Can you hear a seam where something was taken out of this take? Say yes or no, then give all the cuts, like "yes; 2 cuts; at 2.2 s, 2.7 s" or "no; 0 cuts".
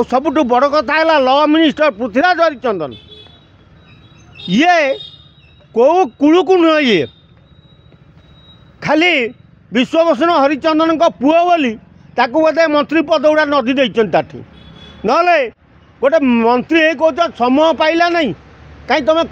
no; 0 cuts